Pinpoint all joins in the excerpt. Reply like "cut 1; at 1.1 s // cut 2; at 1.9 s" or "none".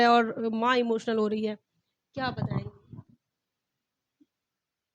none